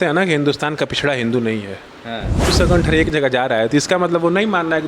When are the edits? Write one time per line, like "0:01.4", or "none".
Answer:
0:02.5